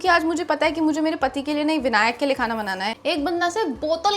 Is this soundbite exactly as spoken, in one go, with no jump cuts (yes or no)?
no